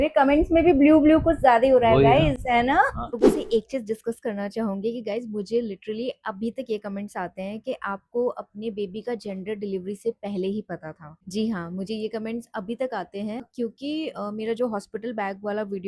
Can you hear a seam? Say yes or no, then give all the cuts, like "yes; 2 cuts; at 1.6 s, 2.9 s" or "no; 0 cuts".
no; 0 cuts